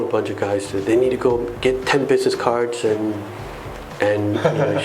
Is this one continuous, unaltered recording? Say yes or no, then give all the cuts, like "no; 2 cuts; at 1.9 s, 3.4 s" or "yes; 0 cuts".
yes; 0 cuts